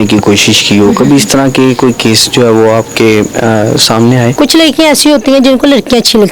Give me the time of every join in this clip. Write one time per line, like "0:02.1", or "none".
0:04.3